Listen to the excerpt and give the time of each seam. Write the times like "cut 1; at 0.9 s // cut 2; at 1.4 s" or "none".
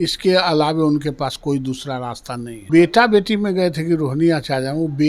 cut 1; at 2.7 s